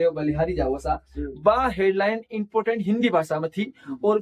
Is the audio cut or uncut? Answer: uncut